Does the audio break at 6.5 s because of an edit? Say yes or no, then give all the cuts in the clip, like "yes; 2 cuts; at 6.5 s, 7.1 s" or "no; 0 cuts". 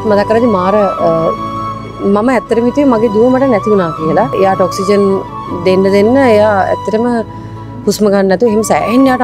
no; 1 cut; at 4.3 s